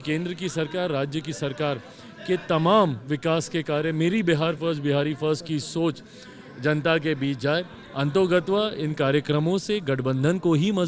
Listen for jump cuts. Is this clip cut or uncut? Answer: uncut